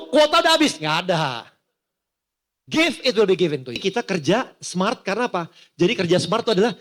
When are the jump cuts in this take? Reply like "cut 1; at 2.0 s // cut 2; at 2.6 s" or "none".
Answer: cut 1; at 3.8 s

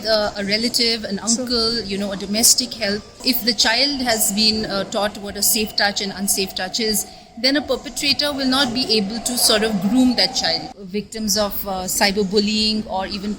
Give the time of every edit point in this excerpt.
cut 1; at 3.2 s // cut 2; at 10.7 s

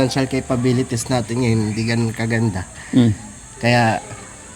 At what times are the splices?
none

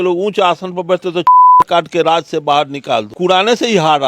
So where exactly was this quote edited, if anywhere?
cut 1; at 3.1 s

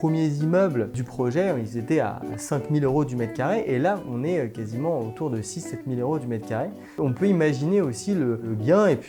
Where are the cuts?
cut 1; at 1.0 s

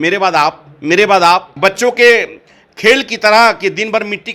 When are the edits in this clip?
cut 1; at 1.5 s

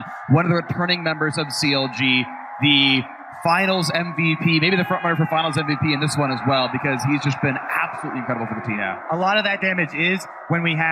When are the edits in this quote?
cut 1; at 6.7 s

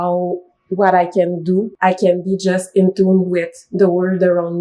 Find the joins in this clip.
cut 1; at 1.7 s

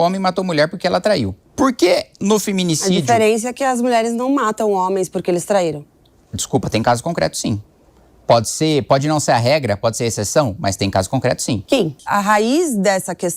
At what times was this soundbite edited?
cut 1; at 1.4 s // cut 2; at 12.0 s

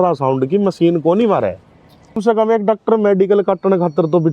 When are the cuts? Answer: cut 1; at 2.2 s

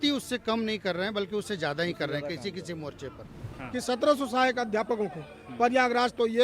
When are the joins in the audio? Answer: cut 1; at 3.5 s

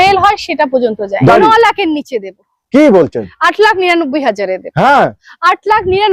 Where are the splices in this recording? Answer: cut 1; at 1.3 s

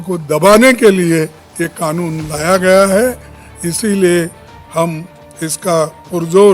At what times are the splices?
none

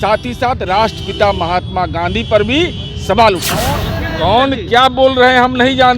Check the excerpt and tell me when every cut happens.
cut 1; at 3.9 s

